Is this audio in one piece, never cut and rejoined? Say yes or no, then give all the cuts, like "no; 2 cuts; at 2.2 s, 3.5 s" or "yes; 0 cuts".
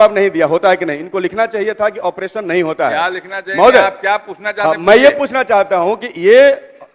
yes; 0 cuts